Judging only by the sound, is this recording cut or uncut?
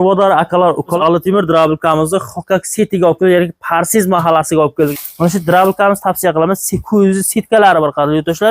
cut